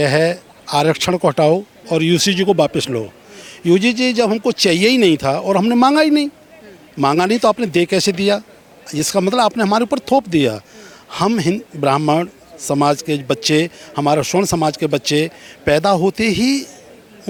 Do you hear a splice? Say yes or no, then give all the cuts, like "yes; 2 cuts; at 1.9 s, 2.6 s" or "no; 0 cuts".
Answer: no; 0 cuts